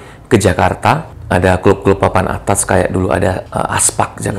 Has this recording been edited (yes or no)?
yes